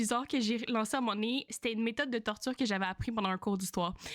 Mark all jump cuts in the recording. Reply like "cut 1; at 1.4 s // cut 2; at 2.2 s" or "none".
cut 1; at 1.5 s